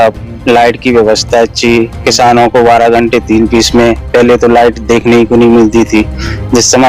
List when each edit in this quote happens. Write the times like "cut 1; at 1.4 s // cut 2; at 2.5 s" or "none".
none